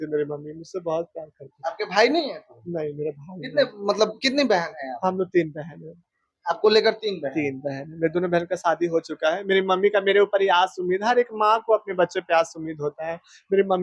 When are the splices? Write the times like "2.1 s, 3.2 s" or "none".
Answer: none